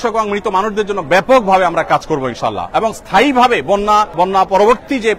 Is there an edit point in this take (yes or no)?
no